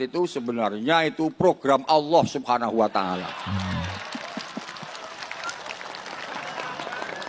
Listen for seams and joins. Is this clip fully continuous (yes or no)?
yes